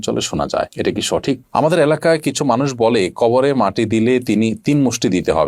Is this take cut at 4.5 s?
no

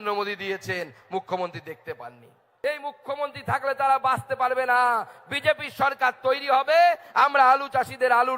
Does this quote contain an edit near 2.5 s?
yes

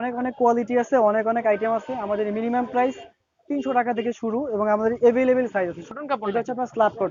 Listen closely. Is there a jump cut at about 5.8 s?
yes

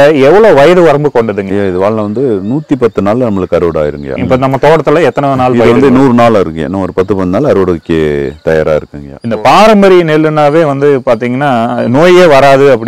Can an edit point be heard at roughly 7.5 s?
no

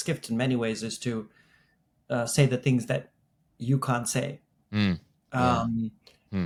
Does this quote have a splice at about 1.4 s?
no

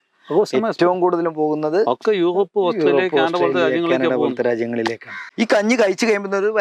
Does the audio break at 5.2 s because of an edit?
yes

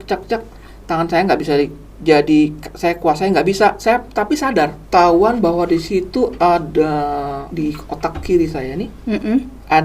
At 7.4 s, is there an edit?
yes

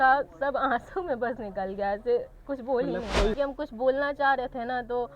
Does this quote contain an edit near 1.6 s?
no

